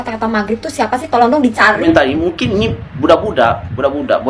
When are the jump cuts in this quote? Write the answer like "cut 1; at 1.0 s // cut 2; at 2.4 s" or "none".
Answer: cut 1; at 1.8 s

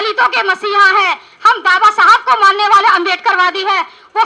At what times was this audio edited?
none

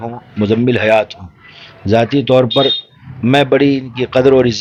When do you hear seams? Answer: none

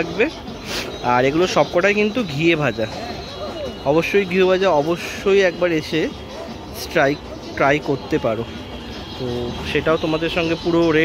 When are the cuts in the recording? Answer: none

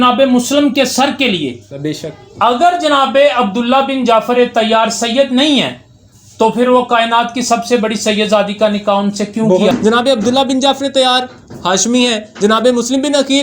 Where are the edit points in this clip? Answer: cut 1; at 1.7 s // cut 2; at 9.7 s

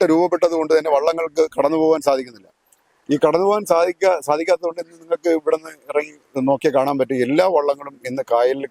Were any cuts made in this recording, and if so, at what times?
none

